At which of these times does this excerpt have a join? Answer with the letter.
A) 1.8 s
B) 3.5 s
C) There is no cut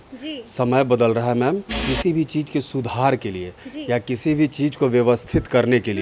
A